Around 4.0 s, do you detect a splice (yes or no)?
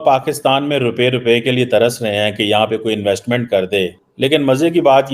yes